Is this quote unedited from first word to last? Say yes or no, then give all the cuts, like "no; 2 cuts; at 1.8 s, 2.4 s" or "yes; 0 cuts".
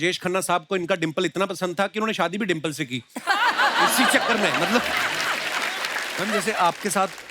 no; 1 cut; at 6.2 s